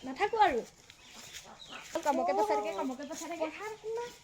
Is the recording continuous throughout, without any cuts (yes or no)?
no